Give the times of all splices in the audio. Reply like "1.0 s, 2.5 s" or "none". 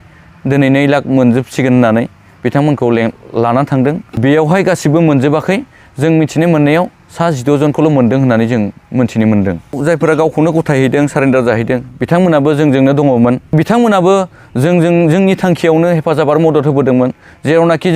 4.1 s, 9.8 s, 13.5 s